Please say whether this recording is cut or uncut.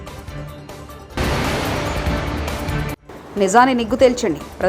cut